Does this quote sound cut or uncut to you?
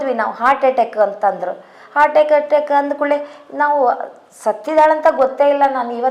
uncut